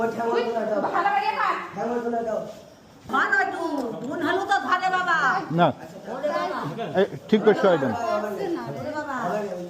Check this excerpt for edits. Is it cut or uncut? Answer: cut